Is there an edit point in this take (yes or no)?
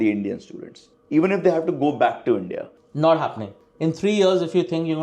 yes